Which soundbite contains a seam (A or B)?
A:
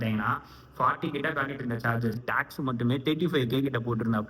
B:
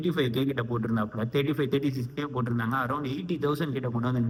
A